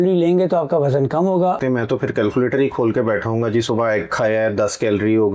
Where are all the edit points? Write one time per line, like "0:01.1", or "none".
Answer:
0:01.6